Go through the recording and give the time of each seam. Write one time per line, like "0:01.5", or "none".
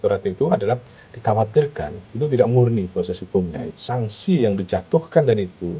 0:03.7